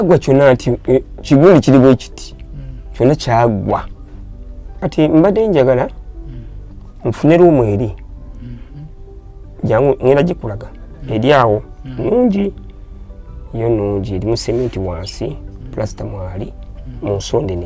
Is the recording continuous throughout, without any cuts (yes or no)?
no